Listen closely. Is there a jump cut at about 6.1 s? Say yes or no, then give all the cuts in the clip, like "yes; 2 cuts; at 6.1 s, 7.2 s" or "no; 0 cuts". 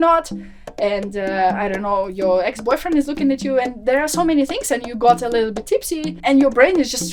yes; 1 cut; at 6.1 s